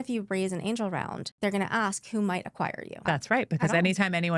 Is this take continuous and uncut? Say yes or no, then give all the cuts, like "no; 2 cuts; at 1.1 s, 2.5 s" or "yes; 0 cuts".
no; 2 cuts; at 1.2 s, 2.9 s